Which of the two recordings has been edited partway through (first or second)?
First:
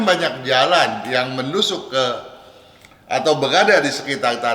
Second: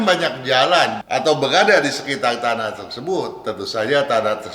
second